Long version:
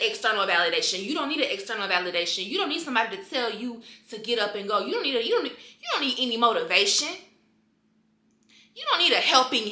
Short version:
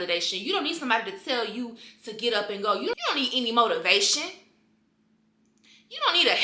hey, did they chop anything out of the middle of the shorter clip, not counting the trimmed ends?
yes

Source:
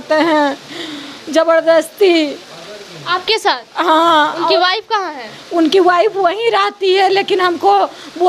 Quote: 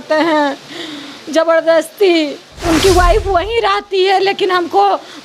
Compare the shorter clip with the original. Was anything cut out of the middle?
yes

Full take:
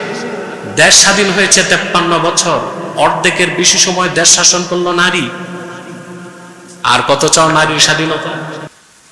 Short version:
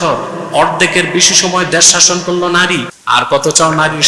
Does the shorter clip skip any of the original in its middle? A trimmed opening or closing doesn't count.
yes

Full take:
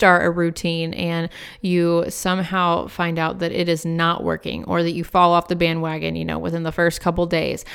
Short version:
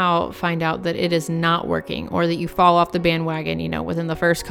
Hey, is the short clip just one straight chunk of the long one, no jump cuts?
yes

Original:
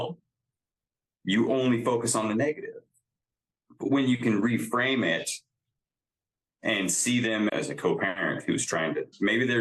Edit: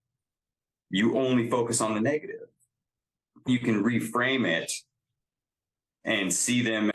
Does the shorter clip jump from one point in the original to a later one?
yes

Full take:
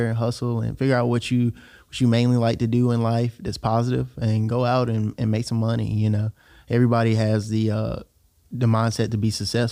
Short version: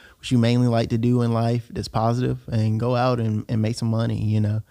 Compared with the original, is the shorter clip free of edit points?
yes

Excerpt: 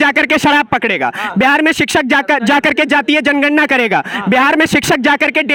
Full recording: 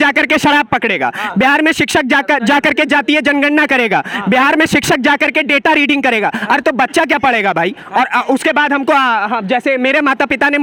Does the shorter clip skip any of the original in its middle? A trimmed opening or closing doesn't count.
no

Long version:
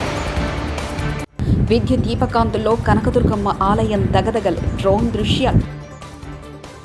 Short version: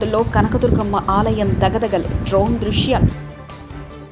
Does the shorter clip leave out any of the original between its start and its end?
no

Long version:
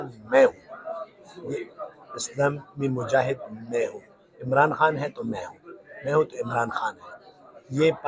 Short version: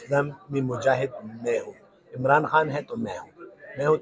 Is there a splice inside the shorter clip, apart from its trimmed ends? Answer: no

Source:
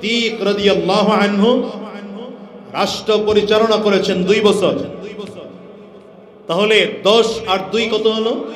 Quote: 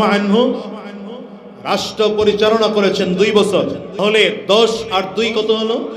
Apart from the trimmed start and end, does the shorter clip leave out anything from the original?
yes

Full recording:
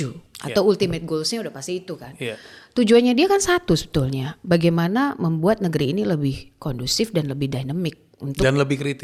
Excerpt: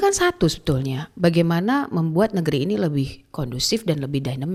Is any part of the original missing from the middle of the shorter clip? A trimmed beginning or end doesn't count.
no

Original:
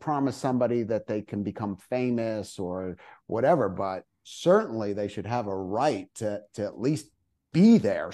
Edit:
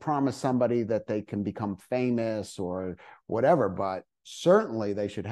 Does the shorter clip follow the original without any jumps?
yes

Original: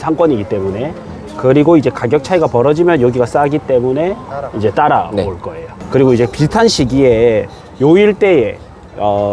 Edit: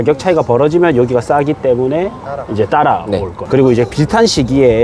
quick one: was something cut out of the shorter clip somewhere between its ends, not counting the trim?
yes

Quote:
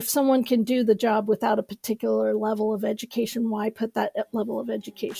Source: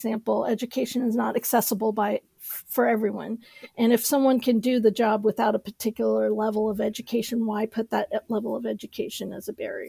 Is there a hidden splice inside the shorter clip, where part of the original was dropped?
no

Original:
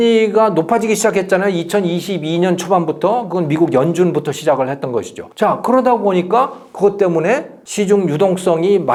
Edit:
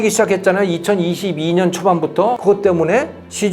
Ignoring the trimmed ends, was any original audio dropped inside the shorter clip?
yes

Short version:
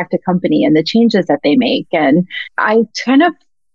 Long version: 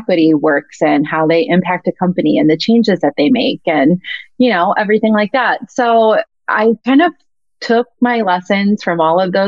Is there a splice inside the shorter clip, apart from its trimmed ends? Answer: yes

